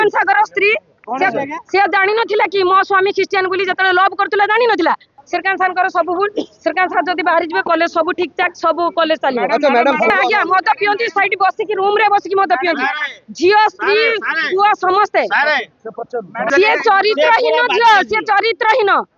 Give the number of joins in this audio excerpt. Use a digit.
3